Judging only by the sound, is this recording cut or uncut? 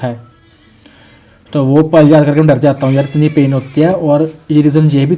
uncut